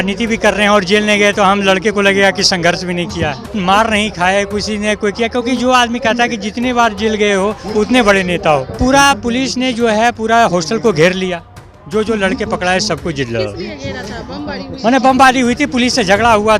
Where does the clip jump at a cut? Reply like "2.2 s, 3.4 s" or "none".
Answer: 3.5 s, 8.8 s